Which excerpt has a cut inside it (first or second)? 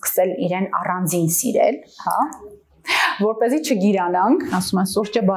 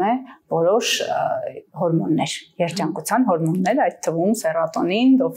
first